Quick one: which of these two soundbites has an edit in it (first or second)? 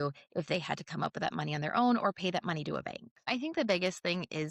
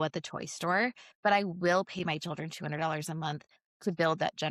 first